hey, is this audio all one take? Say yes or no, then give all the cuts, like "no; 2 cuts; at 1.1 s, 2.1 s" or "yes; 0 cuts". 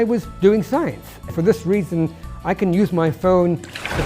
no; 1 cut; at 1.3 s